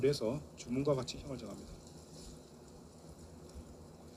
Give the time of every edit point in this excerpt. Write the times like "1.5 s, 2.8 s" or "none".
none